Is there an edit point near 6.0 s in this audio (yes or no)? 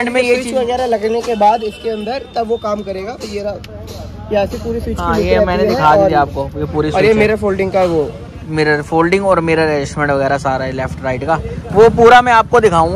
no